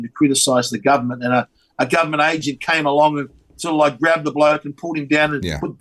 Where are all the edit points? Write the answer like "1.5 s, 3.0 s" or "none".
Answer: none